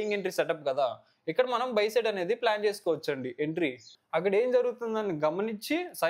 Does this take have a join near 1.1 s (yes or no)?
no